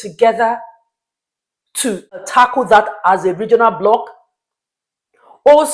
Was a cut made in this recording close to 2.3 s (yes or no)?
yes